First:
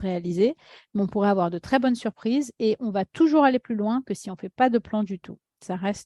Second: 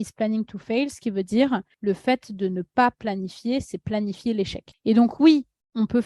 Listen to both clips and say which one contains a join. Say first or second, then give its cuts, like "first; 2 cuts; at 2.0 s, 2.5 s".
second; 2 cuts; at 1.7 s, 4.6 s